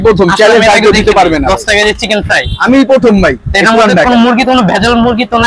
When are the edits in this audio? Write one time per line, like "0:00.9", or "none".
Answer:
none